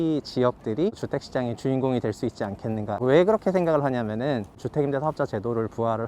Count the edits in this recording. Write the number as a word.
three